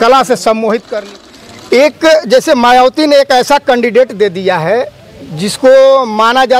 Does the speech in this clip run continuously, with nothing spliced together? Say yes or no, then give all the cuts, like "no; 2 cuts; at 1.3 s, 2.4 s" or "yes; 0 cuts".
no; 1 cut; at 0.9 s